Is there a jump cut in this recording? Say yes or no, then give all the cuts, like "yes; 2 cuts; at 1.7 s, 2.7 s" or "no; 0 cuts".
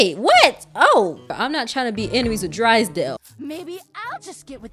yes; 2 cuts; at 1.3 s, 3.3 s